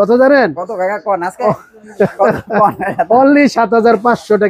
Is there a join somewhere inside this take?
no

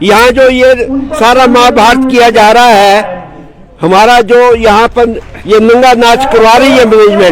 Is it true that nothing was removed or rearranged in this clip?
yes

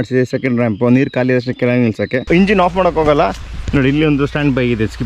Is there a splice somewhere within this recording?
yes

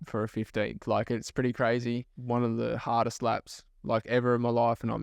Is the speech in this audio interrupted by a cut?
yes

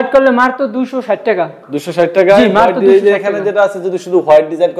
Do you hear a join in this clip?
no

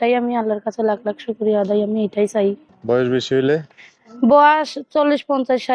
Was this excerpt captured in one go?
no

